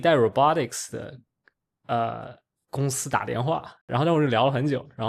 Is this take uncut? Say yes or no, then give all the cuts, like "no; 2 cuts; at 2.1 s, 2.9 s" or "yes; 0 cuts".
no; 1 cut; at 3.8 s